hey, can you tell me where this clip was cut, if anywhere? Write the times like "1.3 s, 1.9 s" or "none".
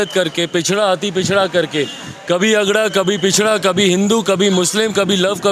none